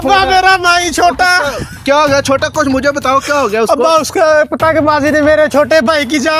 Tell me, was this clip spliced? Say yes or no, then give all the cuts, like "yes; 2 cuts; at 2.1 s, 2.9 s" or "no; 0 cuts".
no; 0 cuts